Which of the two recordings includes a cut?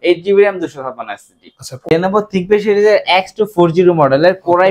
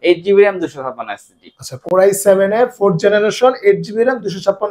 first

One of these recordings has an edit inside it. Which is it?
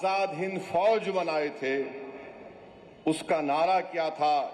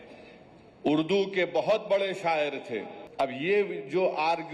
second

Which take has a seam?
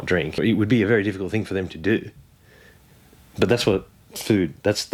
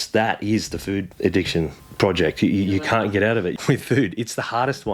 second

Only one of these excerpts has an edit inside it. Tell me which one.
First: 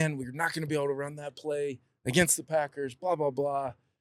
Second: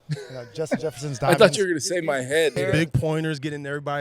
second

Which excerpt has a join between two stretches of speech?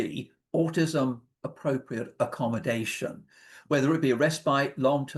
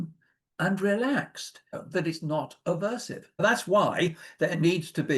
second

